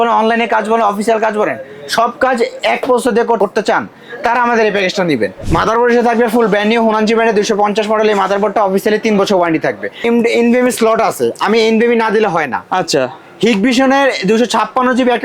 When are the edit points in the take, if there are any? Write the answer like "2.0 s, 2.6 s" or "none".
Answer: 3.4 s, 5.4 s, 10.0 s